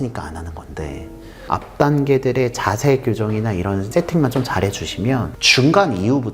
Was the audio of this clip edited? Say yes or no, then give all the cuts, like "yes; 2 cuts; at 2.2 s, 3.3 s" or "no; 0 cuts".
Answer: yes; 3 cuts; at 1.5 s, 3.9 s, 5.4 s